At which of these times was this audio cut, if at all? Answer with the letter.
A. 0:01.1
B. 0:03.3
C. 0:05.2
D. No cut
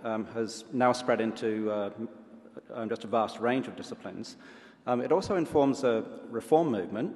C